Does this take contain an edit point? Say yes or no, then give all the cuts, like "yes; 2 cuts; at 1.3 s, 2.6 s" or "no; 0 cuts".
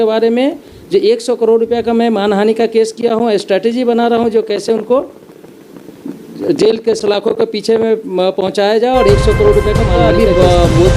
yes; 1 cut; at 10.0 s